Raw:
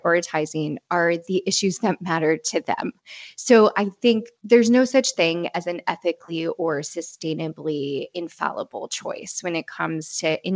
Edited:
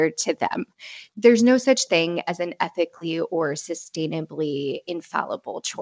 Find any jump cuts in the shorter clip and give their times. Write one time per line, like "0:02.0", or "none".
0:01.0

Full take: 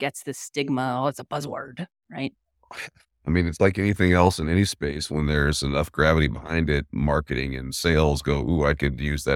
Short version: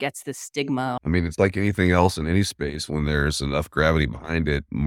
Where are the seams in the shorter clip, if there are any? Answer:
0:01.0

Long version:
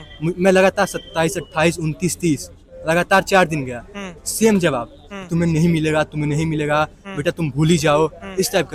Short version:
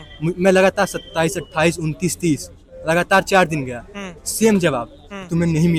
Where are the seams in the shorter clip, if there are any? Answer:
none

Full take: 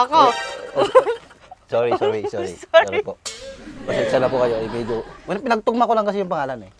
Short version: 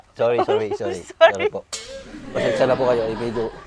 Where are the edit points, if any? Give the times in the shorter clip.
none

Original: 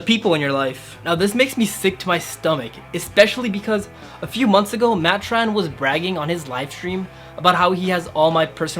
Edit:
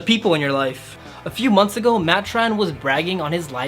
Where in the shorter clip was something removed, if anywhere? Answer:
0:01.0

